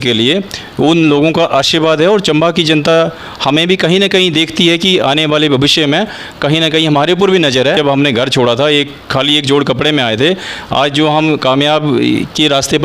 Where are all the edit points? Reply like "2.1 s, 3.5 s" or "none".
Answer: 7.8 s